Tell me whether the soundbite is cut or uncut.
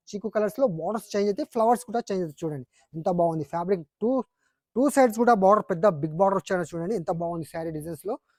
uncut